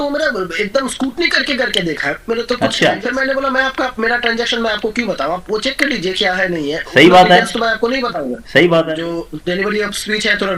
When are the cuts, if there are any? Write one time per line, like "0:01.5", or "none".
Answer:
0:03.0
0:08.9

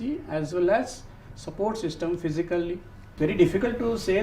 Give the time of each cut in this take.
0:03.0

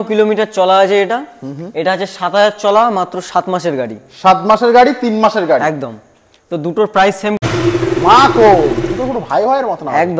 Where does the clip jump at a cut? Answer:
0:07.4

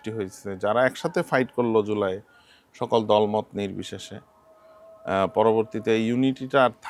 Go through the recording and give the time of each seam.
none

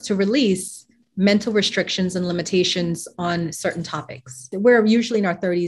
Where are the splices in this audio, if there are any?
0:04.5

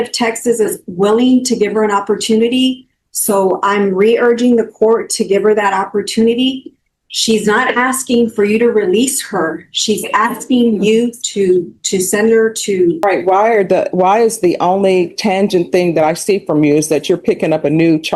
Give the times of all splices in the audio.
0:13.0

